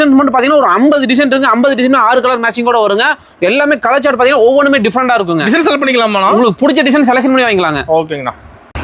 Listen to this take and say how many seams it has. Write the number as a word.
zero